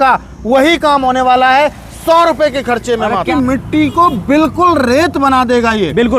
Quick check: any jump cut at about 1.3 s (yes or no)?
no